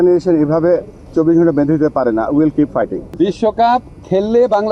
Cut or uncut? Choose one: cut